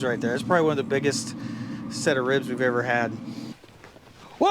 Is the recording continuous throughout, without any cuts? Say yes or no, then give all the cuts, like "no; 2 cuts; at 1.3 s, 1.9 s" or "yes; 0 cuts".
no; 1 cut; at 3.5 s